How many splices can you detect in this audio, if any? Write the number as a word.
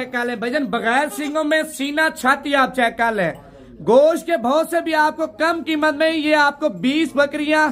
zero